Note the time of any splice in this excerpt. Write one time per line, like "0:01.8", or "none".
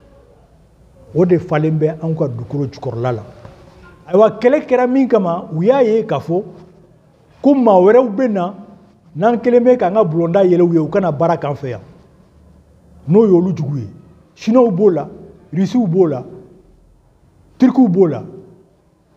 0:04.1